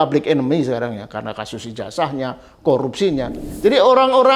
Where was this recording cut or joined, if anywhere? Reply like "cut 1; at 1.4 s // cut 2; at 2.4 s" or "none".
cut 1; at 3.4 s

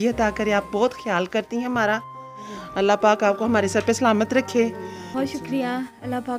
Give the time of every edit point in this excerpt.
cut 1; at 5.1 s

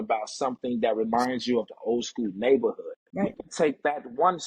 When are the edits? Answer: cut 1; at 3.4 s

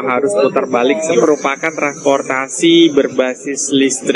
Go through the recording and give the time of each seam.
cut 1; at 1.2 s

